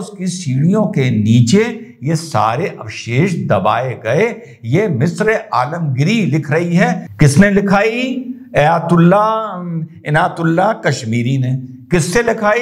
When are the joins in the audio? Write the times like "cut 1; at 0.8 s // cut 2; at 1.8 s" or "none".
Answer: cut 1; at 7.1 s